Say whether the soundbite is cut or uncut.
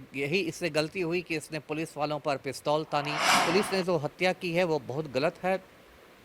cut